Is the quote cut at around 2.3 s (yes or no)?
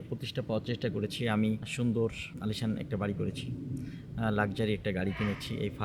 yes